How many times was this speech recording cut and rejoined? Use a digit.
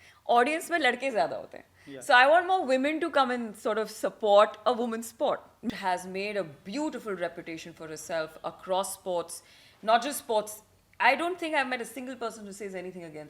1